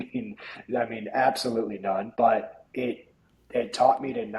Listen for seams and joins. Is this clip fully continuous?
no; 1 cut; at 2.1 s

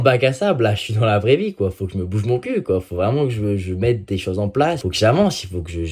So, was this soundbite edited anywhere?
no; 0 cuts

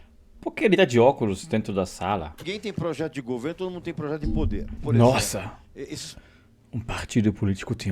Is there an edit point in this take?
yes; 2 cuts; at 2.5 s, 4.8 s

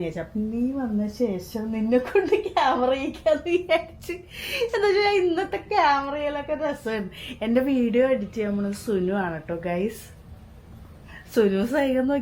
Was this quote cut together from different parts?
no; 0 cuts

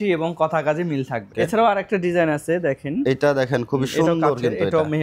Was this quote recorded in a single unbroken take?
no; 1 cut; at 1.2 s

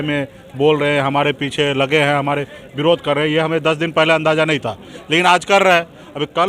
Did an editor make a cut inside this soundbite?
no; 0 cuts

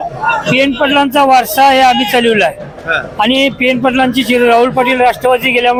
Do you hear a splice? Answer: no; 0 cuts

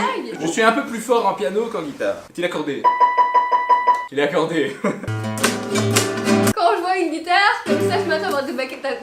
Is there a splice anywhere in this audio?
no; 0 cuts

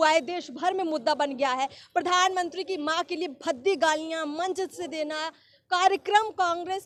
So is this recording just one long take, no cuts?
yes; 0 cuts

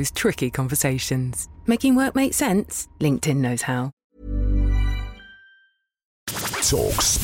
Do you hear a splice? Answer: yes; 2 cuts; at 3.9 s, 6.3 s

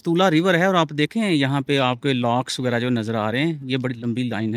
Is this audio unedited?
yes; 0 cuts

